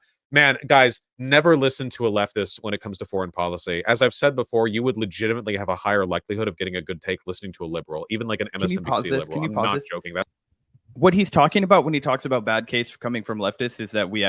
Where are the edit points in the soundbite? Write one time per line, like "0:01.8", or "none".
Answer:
none